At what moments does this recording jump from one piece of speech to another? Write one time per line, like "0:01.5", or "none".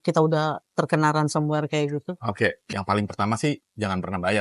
0:02.6